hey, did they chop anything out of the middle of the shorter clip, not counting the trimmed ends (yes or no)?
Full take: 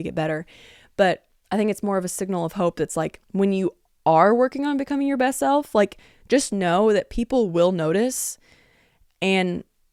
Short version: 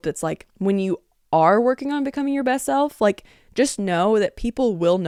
no